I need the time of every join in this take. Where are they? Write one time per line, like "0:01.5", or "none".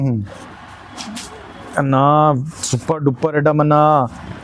none